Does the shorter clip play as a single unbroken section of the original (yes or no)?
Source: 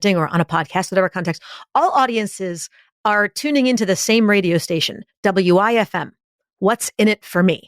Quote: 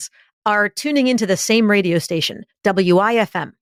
yes